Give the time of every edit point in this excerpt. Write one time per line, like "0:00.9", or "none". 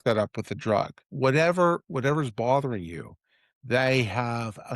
0:01.1